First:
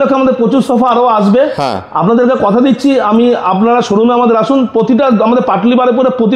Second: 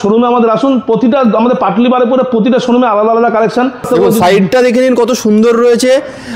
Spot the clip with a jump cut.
second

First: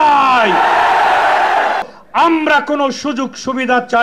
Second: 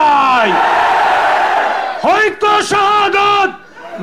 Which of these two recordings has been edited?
first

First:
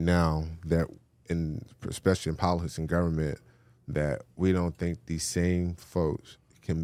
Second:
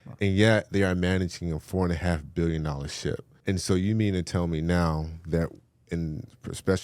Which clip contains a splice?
second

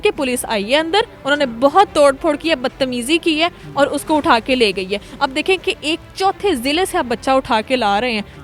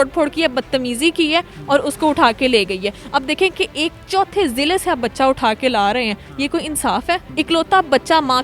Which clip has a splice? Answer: second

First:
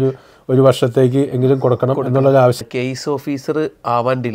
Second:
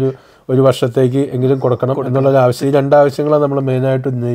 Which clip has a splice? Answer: first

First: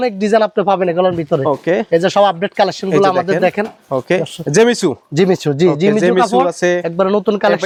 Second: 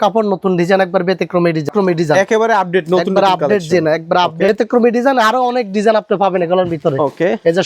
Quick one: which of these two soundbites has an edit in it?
second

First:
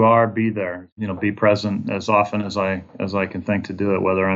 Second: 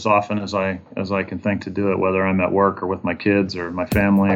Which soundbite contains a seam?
first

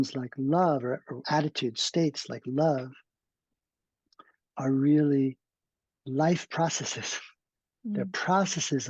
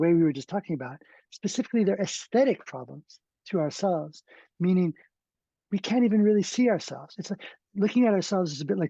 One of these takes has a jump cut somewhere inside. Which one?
first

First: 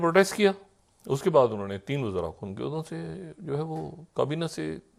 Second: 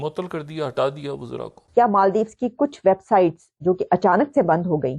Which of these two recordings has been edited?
second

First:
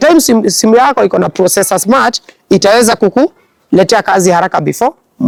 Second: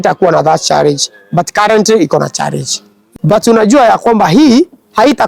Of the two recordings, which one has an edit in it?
second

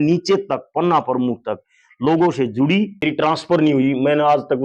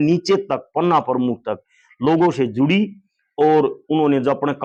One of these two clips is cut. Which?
first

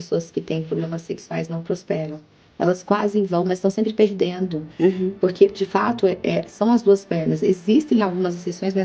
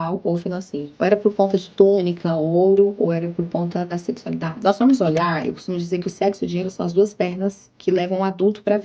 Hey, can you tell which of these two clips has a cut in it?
second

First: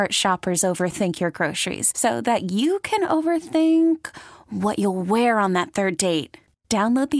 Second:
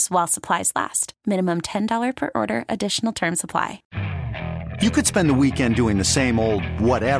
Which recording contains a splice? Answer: second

